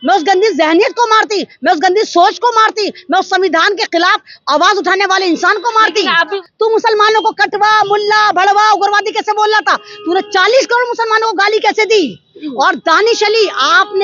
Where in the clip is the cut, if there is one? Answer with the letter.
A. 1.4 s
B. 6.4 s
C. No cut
B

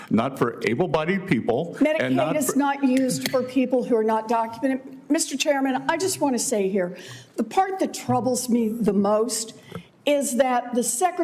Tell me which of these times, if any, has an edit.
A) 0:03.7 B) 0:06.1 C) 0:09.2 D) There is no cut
D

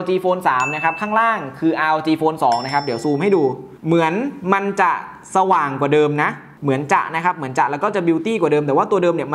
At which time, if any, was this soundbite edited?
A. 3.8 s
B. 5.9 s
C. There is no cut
C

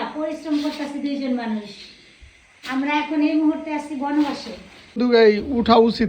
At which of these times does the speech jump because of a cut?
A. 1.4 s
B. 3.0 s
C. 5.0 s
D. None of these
C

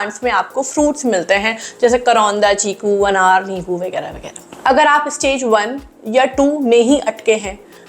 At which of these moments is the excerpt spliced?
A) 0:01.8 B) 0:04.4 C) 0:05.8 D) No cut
D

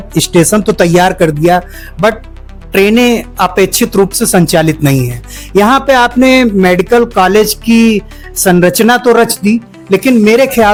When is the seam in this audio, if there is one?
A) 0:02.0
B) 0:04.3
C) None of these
C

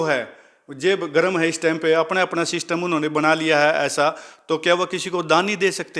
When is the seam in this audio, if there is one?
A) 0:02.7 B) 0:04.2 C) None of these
C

